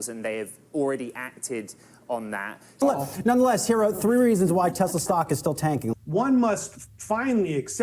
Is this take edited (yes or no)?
yes